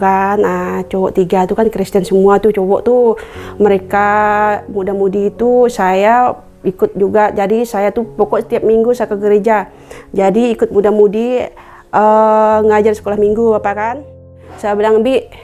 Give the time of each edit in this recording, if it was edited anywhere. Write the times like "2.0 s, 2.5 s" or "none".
14.3 s